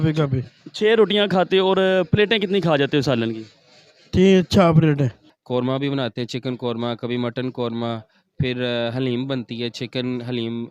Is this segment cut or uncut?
cut